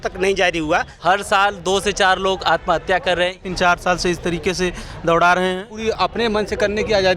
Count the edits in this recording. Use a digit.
3